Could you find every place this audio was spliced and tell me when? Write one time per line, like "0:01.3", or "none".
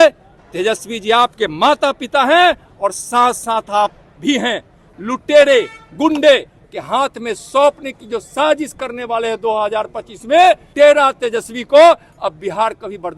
0:04.8
0:10.7